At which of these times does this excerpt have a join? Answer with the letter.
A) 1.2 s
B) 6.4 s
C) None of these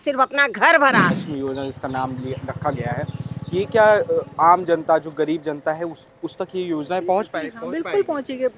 A